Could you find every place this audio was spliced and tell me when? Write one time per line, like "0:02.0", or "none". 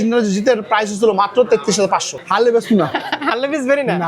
0:02.2